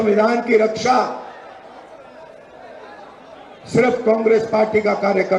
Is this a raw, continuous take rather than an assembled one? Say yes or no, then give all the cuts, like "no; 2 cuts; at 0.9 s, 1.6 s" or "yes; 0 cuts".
yes; 0 cuts